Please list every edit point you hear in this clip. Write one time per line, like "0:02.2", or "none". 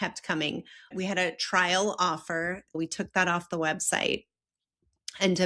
0:00.9
0:02.8